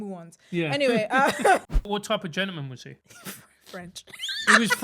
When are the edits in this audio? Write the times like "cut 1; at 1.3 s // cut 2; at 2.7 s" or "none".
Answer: cut 1; at 1.8 s // cut 2; at 3.1 s